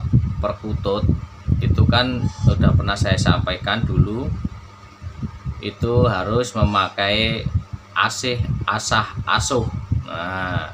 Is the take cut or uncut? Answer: uncut